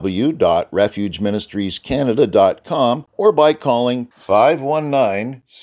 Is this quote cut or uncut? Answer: cut